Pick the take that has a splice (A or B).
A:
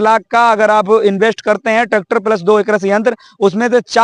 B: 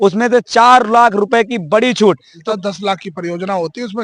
B